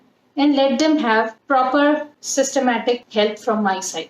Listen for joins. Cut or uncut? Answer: cut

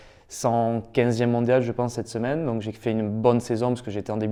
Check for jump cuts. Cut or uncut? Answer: uncut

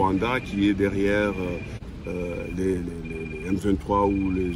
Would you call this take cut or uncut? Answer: cut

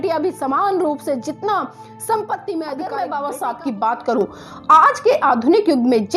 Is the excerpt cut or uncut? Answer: cut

